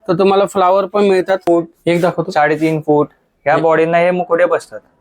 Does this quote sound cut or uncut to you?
cut